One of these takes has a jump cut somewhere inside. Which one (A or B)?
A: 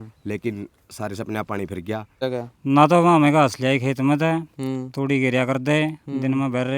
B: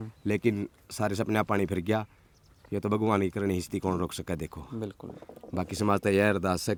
A